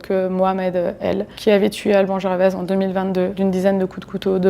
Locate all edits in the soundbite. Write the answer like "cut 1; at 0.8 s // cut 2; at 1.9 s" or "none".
cut 1; at 1.3 s // cut 2; at 3.4 s